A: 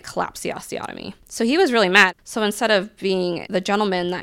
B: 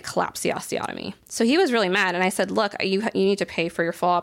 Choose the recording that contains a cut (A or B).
A